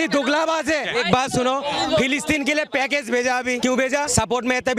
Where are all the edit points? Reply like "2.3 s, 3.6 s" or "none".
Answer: 0.9 s, 3.8 s